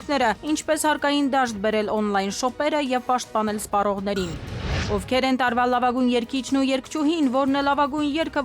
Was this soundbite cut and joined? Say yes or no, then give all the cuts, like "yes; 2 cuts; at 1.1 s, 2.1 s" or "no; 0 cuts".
yes; 1 cut; at 4.8 s